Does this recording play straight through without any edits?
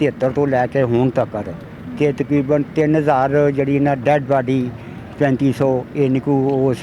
yes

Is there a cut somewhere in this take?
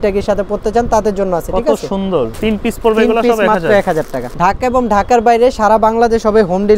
yes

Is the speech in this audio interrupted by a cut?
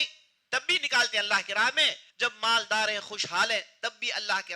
yes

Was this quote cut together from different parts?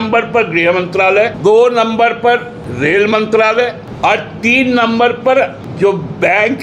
yes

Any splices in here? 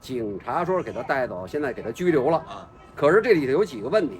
no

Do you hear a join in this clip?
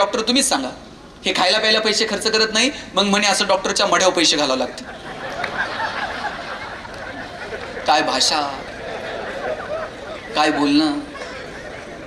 no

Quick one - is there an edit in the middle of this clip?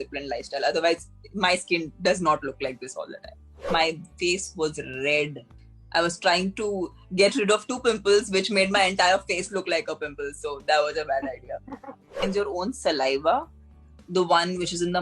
yes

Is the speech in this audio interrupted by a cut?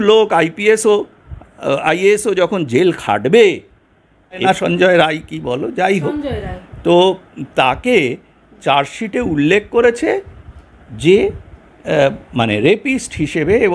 yes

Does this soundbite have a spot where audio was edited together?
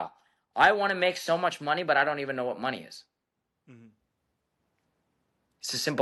no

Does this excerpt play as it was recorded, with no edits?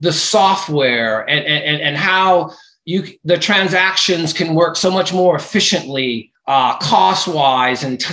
no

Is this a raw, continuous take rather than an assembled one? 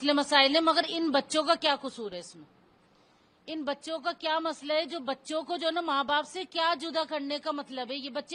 yes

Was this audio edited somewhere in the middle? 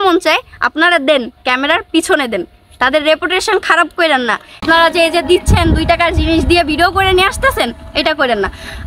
no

